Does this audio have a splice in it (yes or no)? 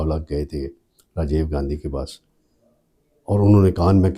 no